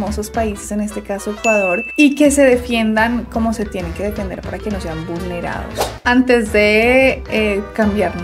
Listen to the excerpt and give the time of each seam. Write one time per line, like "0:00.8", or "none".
0:05.9